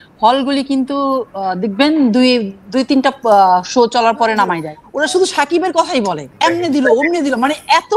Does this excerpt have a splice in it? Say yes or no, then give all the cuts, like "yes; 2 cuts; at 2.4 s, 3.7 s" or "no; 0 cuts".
yes; 2 cuts; at 4.7 s, 6.3 s